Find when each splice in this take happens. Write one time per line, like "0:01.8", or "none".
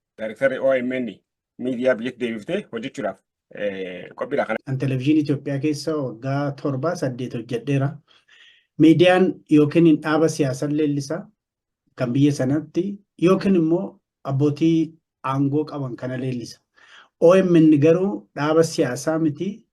0:04.5